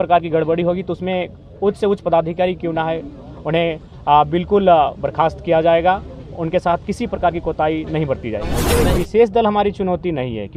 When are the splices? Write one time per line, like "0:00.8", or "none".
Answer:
0:08.9